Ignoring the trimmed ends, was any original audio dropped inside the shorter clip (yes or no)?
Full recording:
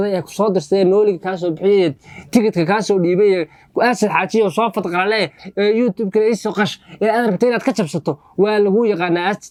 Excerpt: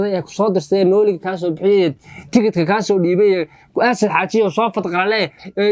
no